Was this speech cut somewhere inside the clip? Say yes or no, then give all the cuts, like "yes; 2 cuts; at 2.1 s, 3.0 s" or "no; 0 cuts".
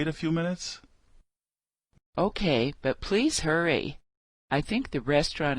yes; 1 cut; at 2.1 s